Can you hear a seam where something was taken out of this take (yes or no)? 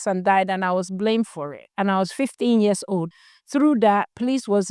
yes